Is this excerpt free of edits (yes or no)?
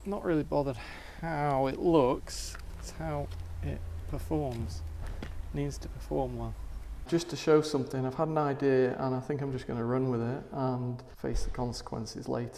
no